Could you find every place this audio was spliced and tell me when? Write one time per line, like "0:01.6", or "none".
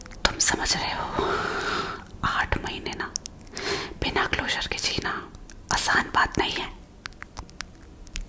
none